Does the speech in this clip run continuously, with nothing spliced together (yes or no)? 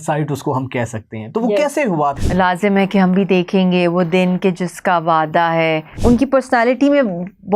no